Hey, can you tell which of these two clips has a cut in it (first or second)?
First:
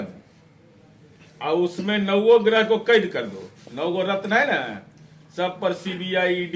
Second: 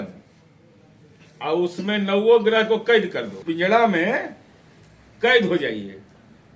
second